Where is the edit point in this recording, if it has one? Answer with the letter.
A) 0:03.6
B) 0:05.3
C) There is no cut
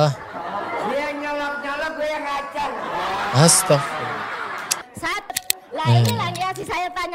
B